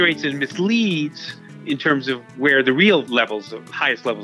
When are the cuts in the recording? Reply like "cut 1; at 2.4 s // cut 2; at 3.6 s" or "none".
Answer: cut 1; at 3.1 s